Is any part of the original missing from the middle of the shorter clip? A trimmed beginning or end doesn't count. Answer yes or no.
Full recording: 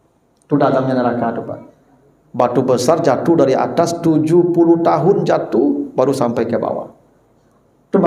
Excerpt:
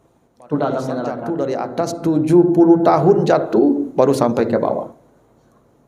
yes